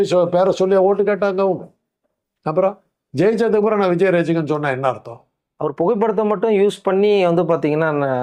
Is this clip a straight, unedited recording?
yes; 0 cuts

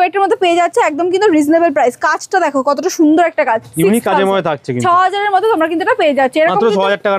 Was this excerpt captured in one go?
yes; 0 cuts

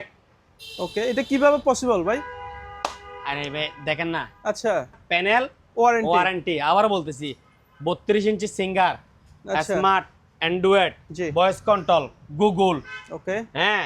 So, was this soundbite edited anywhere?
yes; 1 cut; at 5.0 s

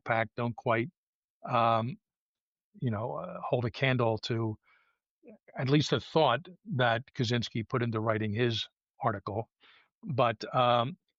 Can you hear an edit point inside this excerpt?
no; 0 cuts

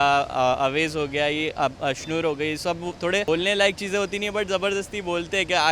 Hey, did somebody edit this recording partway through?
yes; 1 cut; at 3.2 s

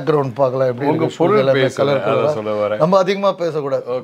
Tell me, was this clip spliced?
no; 0 cuts

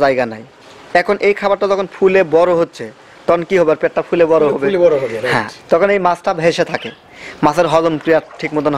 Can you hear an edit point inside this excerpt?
no; 0 cuts

